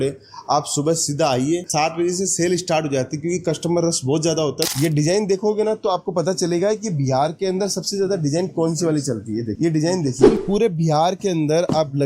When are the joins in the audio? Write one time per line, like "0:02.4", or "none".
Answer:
0:01.7
0:04.7
0:10.3